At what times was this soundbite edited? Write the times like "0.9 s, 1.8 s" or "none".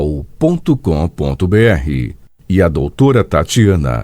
1.7 s

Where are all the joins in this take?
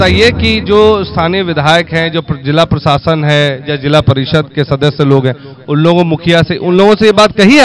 none

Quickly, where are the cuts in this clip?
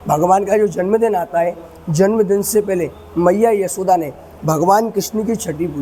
none

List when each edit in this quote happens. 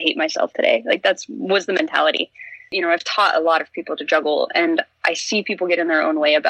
2.7 s

